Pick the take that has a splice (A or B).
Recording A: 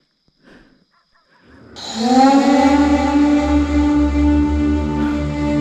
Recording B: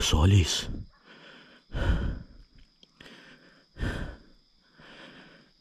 A